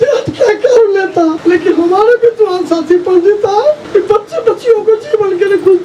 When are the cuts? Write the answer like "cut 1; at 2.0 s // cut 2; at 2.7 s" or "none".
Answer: cut 1; at 1.4 s // cut 2; at 3.8 s